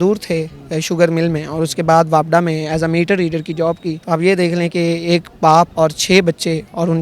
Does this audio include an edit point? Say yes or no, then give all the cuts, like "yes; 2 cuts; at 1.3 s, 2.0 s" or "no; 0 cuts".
yes; 2 cuts; at 3.9 s, 5.7 s